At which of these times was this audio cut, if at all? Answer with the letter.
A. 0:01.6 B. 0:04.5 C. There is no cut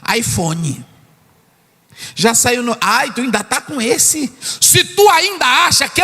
B